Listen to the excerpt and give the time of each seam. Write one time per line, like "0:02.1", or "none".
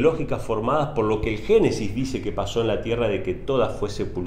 none